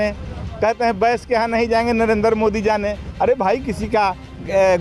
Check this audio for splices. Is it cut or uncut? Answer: uncut